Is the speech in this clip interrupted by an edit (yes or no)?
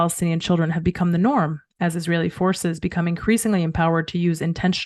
no